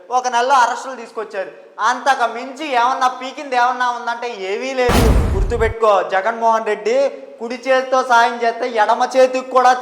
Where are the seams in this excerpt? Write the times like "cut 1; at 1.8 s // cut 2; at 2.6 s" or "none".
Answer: cut 1; at 5.3 s